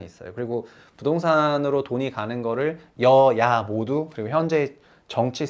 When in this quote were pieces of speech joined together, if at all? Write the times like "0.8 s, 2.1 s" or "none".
none